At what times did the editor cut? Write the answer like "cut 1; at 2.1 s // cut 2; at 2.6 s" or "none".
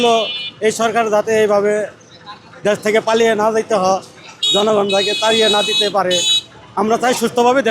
none